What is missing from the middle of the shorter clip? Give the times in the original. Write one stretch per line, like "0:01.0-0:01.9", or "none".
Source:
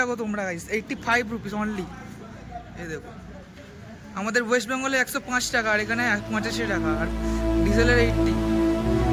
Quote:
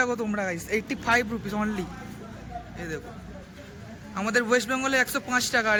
none